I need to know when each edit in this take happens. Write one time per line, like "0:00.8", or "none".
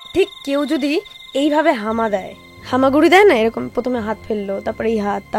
0:01.1